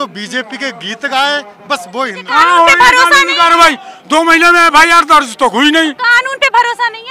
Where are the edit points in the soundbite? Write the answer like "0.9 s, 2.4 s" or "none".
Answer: 2.2 s